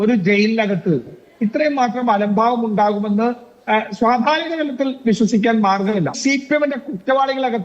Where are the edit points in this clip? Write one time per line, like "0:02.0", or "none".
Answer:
0:06.2